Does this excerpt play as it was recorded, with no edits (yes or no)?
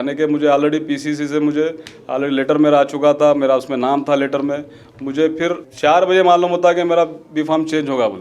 no